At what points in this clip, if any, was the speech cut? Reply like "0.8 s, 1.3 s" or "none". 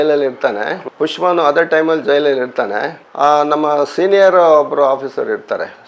none